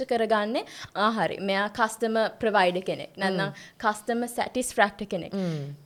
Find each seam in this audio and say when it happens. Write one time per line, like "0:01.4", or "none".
none